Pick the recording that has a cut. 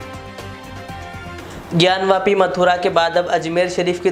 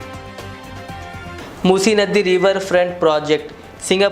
second; 1 cut; at 1.4 s

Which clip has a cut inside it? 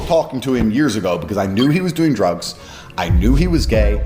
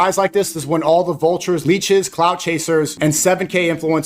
second; 2 cuts; at 1.6 s, 2.9 s

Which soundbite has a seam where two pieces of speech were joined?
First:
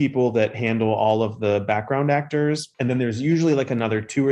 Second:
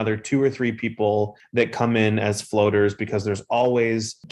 second; 1 cut; at 1.4 s

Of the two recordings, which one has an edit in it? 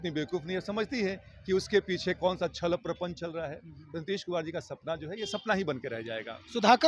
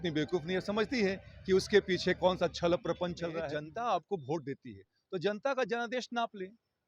second; 1 cut; at 3.5 s

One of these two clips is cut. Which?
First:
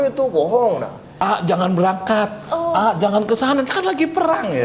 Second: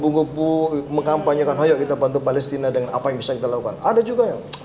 first; 1 cut; at 1.2 s

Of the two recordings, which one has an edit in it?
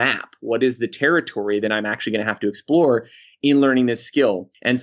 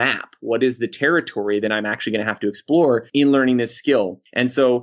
second; 1 cut; at 3.1 s

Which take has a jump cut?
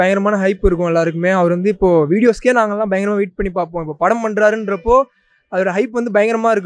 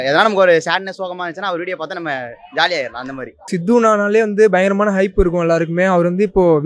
second; 1 cut; at 3.5 s

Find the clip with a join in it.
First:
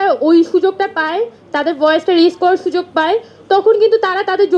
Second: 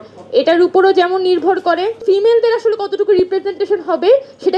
second; 1 cut; at 2.0 s

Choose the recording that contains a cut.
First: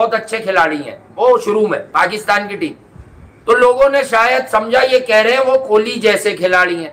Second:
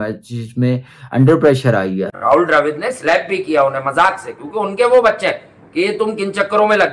second; 1 cut; at 2.1 s

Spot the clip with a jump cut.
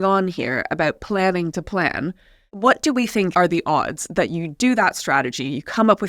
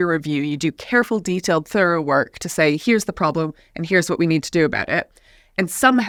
first; 2 cuts; at 2.5 s, 3.3 s

